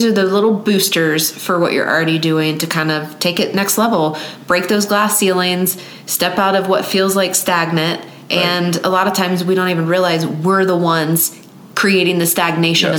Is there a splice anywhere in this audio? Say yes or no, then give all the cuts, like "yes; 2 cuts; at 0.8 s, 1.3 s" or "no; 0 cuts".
no; 0 cuts